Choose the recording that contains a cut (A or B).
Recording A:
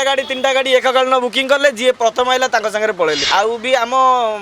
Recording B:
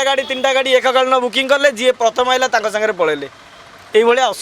A